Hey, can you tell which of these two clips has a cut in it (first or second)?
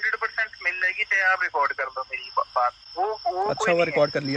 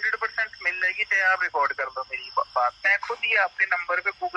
second